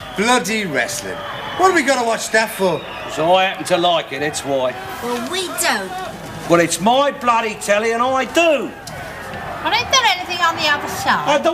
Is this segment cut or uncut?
cut